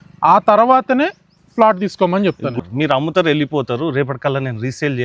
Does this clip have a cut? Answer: yes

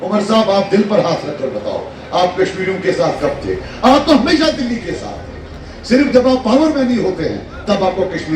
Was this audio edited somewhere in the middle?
no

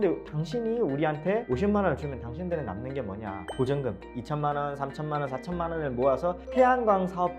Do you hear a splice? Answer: yes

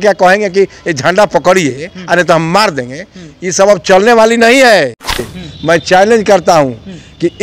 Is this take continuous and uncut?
no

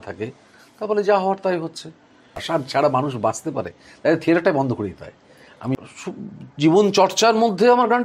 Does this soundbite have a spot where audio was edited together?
yes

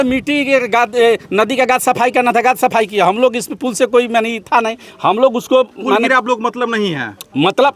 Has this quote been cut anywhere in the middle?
no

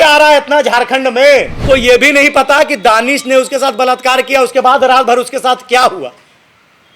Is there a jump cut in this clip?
yes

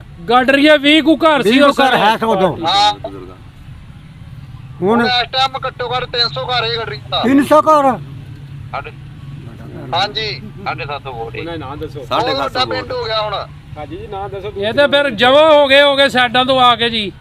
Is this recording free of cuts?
yes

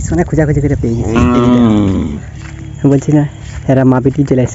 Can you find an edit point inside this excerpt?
no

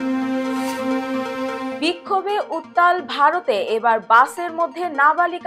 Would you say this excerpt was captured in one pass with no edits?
no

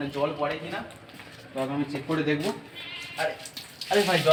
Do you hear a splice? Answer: no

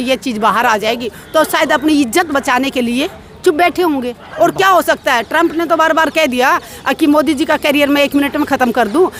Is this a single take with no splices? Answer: yes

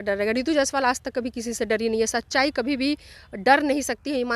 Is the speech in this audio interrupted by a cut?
no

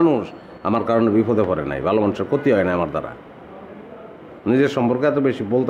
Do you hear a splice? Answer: yes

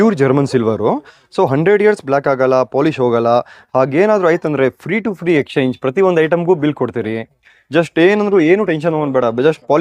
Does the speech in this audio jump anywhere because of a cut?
no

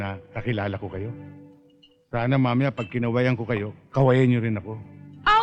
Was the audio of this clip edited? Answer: no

